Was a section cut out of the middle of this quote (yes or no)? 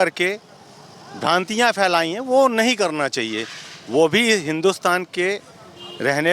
no